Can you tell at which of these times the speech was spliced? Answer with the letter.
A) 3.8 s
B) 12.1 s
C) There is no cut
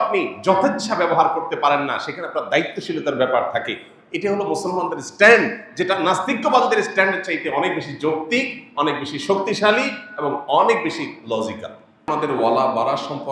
B